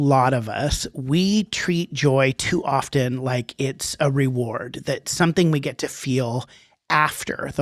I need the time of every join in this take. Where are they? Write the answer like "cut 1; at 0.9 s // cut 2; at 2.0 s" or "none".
none